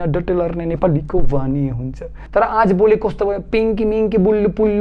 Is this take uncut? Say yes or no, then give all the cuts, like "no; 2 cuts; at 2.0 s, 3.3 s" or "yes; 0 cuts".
no; 1 cut; at 2.2 s